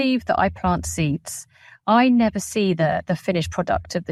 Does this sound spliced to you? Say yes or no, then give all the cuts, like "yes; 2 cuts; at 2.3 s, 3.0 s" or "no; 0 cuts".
no; 0 cuts